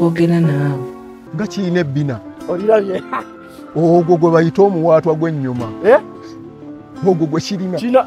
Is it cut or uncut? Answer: cut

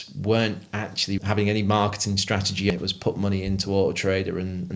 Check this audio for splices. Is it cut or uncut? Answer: cut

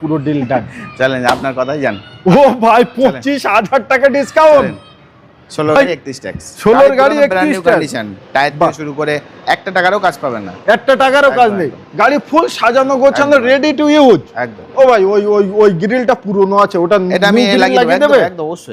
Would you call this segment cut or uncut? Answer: uncut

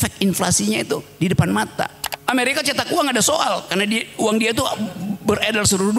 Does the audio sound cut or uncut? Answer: cut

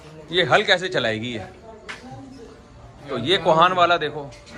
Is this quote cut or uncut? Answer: uncut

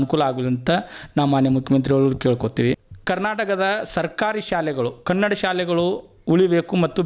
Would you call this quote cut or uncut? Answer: cut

